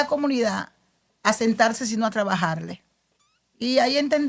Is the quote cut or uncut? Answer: uncut